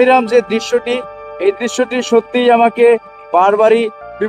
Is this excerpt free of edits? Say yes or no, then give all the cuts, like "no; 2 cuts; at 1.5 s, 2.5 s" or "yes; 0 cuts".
yes; 0 cuts